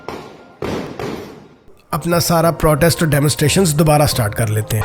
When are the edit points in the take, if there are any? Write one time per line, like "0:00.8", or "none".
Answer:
0:01.8